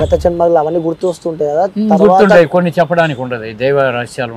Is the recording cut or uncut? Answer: uncut